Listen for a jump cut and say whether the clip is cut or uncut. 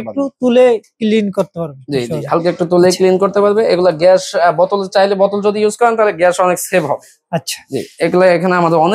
uncut